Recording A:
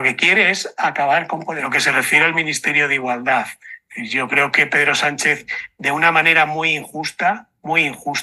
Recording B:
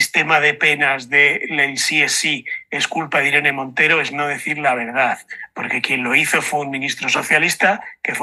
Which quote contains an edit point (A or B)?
A